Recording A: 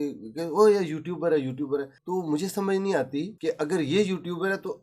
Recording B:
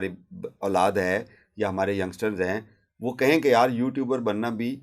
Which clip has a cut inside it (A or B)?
A